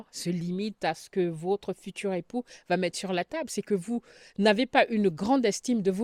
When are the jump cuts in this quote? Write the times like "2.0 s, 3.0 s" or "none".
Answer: none